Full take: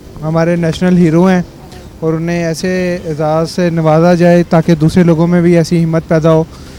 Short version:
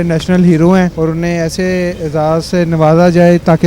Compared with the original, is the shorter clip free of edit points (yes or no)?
no